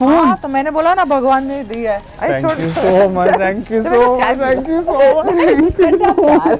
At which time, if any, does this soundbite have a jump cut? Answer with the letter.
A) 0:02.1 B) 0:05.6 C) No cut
A